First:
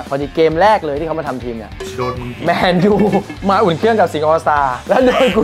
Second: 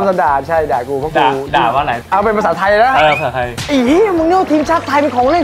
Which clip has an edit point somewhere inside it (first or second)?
second